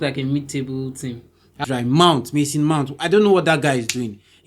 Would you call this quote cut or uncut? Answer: cut